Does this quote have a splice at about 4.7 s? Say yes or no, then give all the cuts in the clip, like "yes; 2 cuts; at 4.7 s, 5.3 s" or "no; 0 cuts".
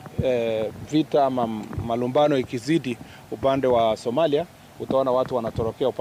no; 0 cuts